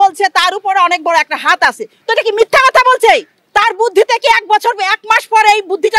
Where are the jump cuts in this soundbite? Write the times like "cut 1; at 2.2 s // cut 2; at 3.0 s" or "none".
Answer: none